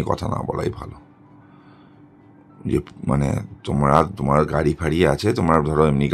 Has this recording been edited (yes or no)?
no